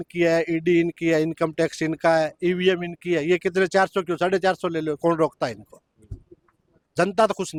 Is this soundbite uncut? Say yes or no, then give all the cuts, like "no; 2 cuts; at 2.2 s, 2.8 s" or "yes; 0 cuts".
yes; 0 cuts